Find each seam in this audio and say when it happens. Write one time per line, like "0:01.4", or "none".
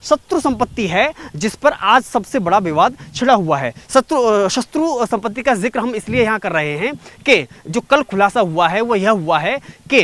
none

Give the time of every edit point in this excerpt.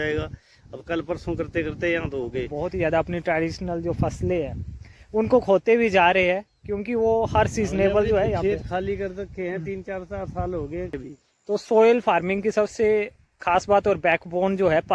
0:02.5
0:11.0

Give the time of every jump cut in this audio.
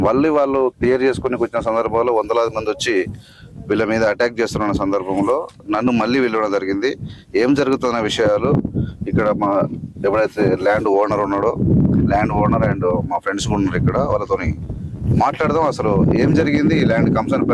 none

